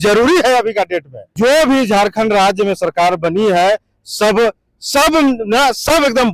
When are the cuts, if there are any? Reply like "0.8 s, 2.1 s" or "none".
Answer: 1.2 s